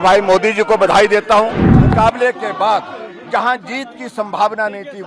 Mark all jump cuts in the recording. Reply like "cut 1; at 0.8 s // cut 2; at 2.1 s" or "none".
cut 1; at 1.7 s

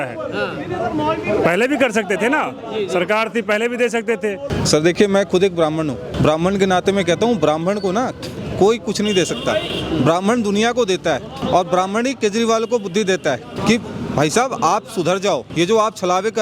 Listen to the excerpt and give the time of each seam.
cut 1; at 4.5 s // cut 2; at 6.1 s // cut 3; at 11.4 s // cut 4; at 13.5 s // cut 5; at 15.5 s

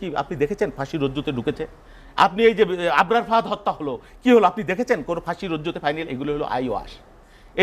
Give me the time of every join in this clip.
none

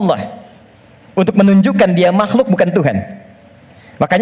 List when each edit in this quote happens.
none

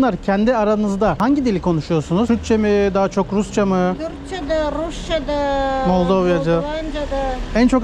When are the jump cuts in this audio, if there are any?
cut 1; at 1.2 s // cut 2; at 2.3 s

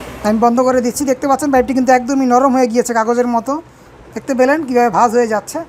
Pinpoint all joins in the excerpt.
none

